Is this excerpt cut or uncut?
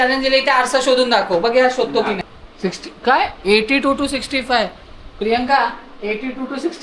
cut